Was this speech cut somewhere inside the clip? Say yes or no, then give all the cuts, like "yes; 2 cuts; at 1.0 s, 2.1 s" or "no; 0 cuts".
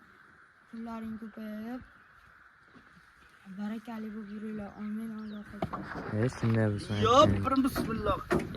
yes; 1 cut; at 6.9 s